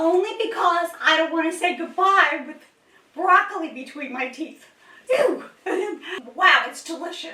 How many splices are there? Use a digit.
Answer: 1